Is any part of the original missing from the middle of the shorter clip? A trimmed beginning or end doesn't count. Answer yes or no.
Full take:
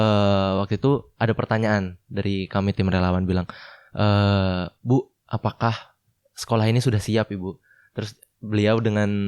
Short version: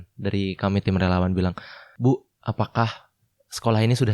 yes